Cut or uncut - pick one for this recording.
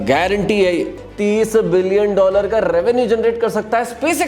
cut